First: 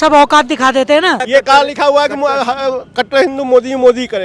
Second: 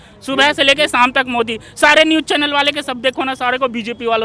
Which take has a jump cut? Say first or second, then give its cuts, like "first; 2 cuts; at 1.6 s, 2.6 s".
first; 1 cut; at 1.2 s